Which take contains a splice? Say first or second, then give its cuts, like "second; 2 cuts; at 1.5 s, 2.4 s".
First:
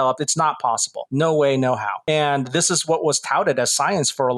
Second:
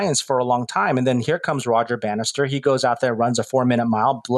first; 2 cuts; at 1.0 s, 1.9 s